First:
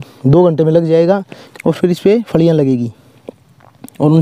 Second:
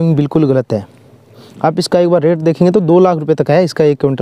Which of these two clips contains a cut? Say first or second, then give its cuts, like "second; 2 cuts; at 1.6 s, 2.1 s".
first; 1 cut; at 1.4 s